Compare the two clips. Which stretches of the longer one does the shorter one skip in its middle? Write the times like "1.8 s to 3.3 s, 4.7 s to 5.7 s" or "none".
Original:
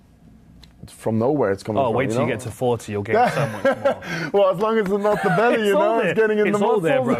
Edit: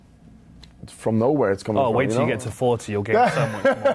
none